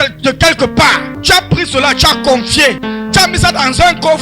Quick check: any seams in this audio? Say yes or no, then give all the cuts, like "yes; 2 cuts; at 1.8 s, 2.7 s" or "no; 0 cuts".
yes; 2 cuts; at 1.1 s, 2.8 s